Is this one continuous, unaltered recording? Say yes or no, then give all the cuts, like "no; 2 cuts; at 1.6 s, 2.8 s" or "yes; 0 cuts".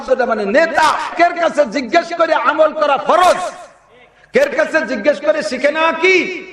no; 1 cut; at 1.1 s